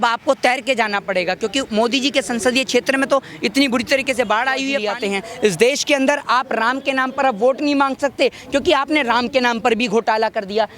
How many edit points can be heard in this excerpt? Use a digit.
1